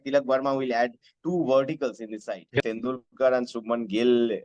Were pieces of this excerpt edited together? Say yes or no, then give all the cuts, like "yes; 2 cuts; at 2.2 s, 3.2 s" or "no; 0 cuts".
yes; 1 cut; at 2.6 s